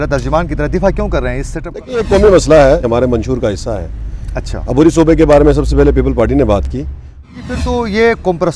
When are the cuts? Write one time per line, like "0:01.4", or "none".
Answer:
0:02.8
0:07.3